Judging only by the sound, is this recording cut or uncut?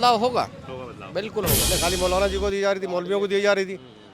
cut